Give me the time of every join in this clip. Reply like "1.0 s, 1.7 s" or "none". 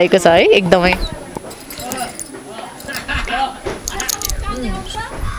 none